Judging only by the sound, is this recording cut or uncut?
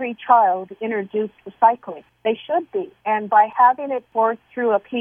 cut